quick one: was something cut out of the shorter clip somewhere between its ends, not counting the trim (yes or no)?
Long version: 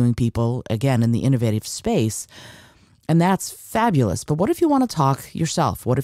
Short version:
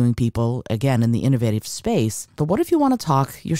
yes